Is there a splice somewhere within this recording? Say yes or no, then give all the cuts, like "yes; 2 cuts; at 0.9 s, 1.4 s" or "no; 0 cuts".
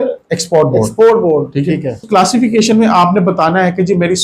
yes; 1 cut; at 2.0 s